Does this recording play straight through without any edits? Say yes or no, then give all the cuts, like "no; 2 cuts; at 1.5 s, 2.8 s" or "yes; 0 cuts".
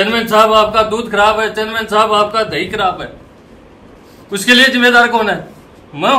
yes; 0 cuts